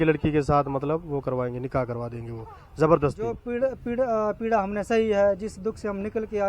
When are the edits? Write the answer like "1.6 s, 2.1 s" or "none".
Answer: 3.4 s